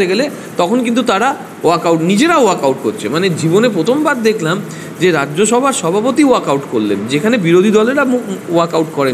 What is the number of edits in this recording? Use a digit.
0